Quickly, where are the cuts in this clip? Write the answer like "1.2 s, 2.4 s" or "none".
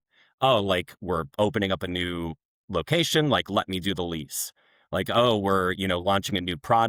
none